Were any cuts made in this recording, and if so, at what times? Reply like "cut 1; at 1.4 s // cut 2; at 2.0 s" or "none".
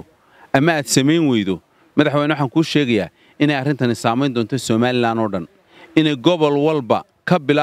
none